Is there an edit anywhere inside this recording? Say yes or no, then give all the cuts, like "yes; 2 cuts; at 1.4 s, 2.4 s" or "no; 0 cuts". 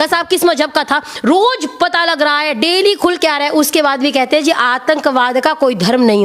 no; 0 cuts